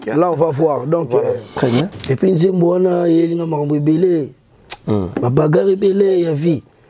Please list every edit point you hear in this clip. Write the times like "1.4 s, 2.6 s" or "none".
1.5 s